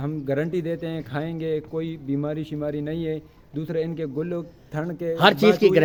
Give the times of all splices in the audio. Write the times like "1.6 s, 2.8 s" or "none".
none